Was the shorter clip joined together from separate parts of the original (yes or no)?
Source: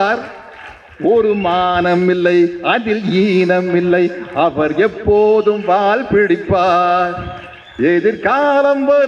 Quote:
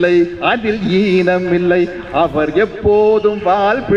no